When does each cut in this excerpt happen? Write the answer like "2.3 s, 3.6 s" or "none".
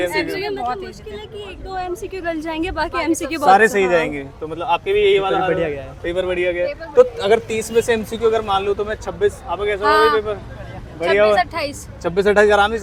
none